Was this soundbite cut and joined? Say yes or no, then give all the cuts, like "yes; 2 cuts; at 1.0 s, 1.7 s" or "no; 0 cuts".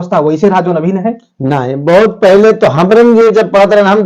no; 0 cuts